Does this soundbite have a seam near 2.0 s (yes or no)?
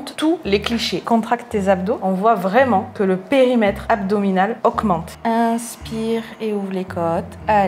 yes